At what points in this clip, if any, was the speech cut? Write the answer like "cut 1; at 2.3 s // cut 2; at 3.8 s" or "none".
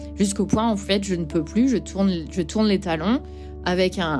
none